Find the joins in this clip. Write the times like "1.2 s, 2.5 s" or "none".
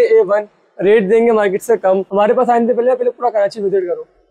2.1 s